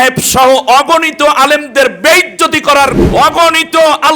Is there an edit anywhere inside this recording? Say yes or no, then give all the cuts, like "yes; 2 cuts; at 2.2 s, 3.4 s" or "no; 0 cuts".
yes; 1 cut; at 3.0 s